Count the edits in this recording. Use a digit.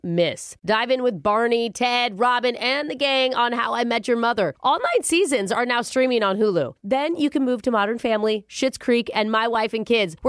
0